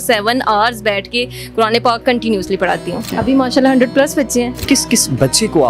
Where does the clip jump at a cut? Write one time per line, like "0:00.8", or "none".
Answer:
0:03.1
0:04.6